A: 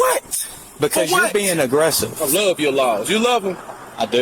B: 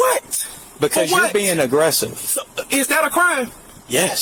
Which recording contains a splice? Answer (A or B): A